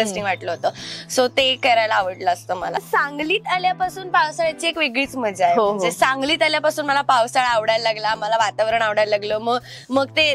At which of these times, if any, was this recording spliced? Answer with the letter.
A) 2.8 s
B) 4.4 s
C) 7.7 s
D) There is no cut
A